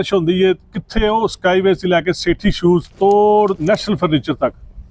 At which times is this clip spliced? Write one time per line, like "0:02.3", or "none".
0:02.9
0:03.6